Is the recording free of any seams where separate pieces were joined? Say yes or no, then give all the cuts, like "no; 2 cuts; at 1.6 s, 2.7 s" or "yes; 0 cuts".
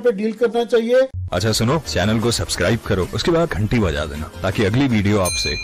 no; 1 cut; at 1.2 s